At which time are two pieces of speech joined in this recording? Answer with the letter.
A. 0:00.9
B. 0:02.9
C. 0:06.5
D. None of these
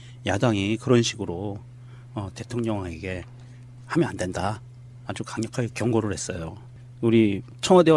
B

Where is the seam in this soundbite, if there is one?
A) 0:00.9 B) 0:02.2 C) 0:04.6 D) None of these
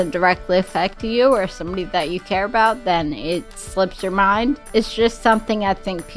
C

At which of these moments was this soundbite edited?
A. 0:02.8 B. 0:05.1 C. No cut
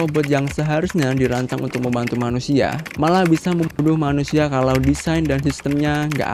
C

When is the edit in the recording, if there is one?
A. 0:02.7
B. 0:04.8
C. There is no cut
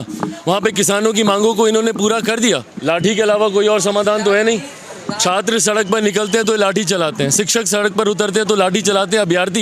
A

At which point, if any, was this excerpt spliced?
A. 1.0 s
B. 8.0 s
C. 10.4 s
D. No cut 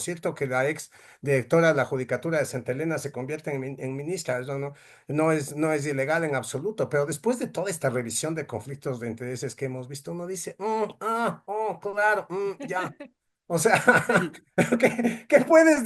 D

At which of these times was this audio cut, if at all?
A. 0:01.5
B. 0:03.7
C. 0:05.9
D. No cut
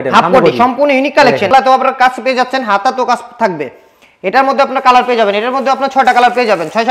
A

